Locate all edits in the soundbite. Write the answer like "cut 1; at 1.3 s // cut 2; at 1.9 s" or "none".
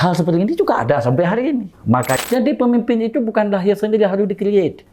cut 1; at 2.2 s